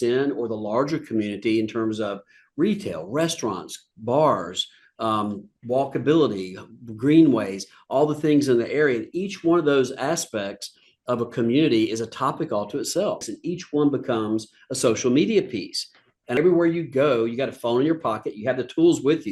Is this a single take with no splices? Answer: no; 2 cuts; at 13.3 s, 16.4 s

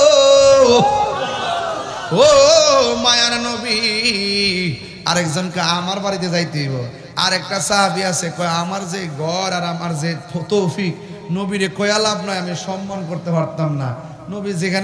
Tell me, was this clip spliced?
yes; 1 cut; at 4.9 s

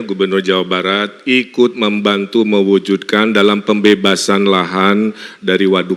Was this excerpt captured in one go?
yes; 0 cuts

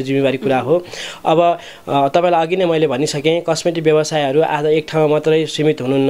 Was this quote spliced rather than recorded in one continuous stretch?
no; 0 cuts

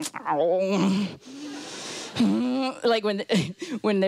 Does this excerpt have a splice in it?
no; 0 cuts

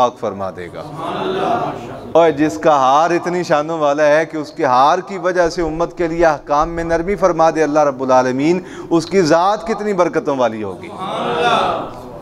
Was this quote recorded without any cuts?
yes; 0 cuts

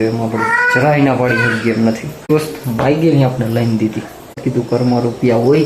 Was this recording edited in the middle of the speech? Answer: yes; 2 cuts; at 2.3 s, 4.4 s

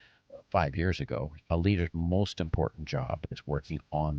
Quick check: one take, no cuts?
no; 1 cut; at 1.4 s

